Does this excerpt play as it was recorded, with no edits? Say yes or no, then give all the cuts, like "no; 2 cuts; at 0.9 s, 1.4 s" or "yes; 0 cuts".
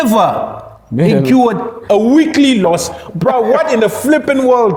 yes; 0 cuts